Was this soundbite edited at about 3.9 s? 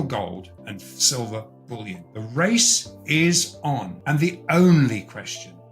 yes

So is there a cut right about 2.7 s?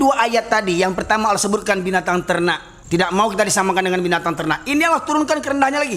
yes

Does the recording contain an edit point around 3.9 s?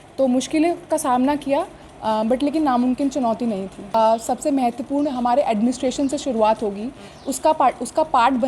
yes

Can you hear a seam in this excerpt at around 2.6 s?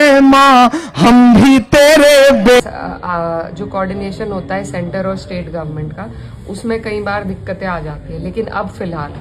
yes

